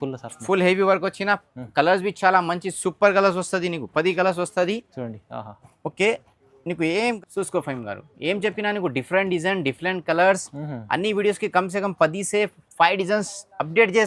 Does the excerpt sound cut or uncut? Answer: cut